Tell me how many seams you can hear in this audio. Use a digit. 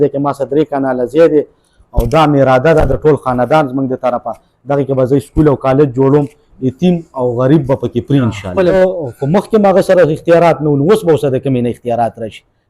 1